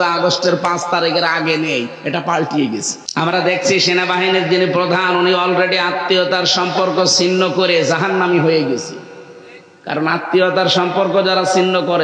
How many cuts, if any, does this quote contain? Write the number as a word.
one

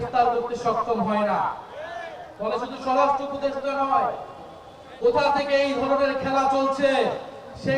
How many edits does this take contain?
zero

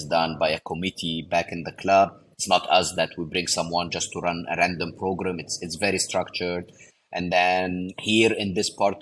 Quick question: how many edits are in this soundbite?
two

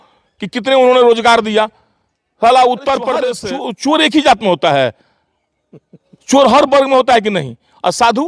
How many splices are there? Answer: one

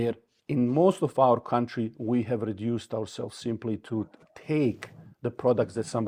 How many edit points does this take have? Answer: zero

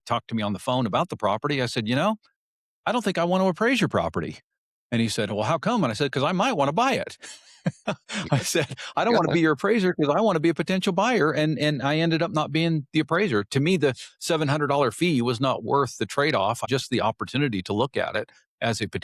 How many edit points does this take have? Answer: one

